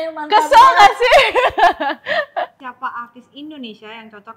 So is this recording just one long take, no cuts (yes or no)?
no